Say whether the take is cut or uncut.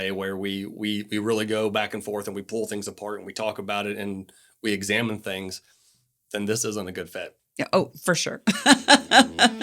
uncut